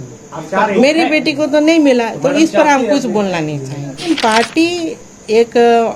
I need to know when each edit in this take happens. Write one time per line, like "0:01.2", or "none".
0:04.0